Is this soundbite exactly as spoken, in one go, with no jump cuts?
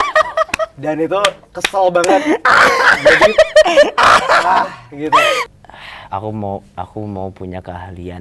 no; 1 cut; at 5.6 s

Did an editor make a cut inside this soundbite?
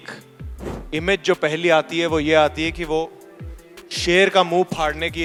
no; 0 cuts

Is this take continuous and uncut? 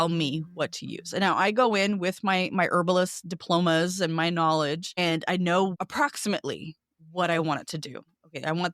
no; 2 cuts; at 4.9 s, 5.8 s

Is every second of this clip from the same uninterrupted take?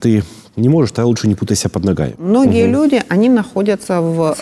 no; 1 cut; at 2.2 s

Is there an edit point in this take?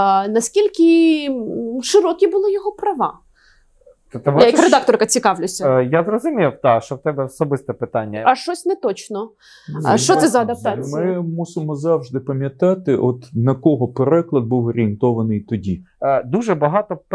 yes; 2 cuts; at 8.2 s, 15.9 s

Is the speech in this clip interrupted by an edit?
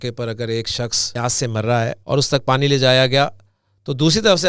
yes; 2 cuts; at 1.0 s, 2.0 s

